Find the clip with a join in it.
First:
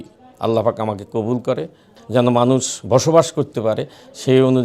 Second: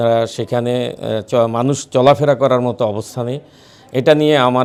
first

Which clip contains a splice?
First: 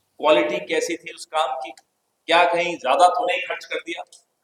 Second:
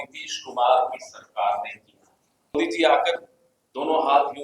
second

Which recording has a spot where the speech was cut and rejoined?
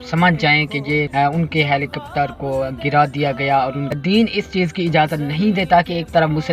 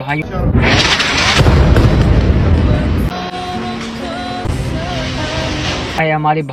first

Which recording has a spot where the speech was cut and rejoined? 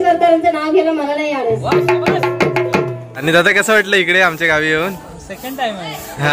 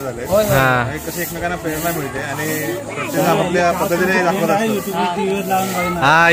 first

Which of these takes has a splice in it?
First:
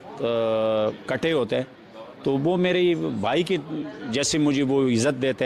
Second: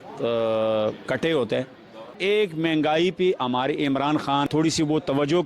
second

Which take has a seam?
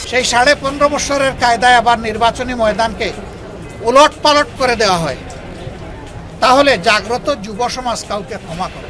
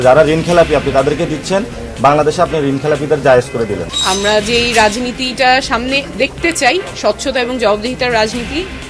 second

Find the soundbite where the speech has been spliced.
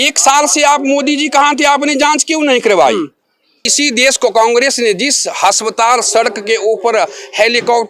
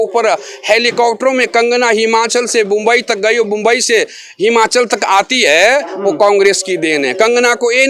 first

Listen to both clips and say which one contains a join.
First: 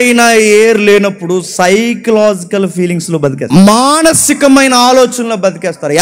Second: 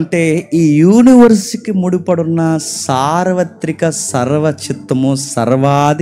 first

